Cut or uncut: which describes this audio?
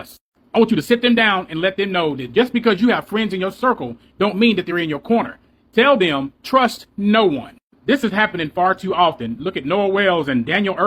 uncut